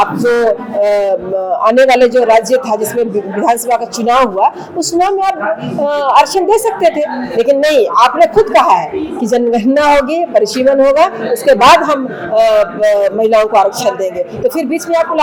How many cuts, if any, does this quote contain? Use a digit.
0